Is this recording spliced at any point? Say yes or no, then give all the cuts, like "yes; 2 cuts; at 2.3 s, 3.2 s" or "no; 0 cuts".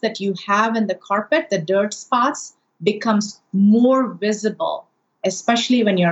yes; 2 cuts; at 2.5 s, 5.2 s